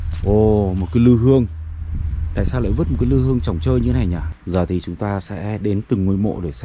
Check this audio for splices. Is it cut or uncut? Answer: cut